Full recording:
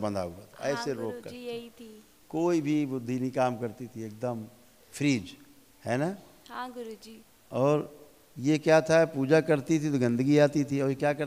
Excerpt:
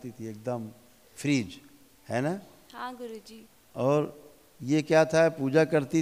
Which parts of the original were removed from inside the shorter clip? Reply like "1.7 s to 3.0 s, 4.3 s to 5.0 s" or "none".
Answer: none